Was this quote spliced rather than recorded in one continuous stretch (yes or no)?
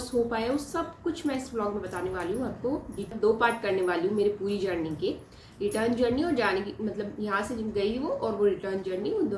yes